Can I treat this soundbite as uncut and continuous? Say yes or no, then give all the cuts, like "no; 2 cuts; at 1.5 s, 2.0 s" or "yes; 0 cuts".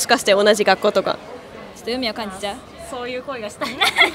yes; 0 cuts